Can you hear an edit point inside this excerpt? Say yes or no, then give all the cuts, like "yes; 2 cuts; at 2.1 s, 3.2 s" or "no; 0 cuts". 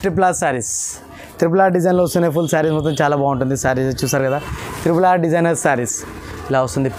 no; 0 cuts